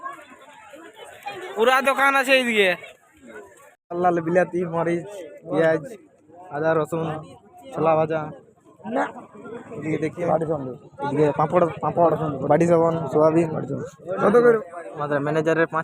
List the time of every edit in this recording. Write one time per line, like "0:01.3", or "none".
0:10.2
0:14.6